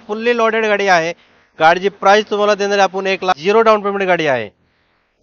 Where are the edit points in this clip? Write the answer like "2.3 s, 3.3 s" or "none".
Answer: 3.4 s